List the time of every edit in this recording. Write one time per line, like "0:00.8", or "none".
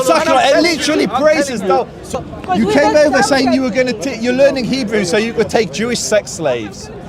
0:02.2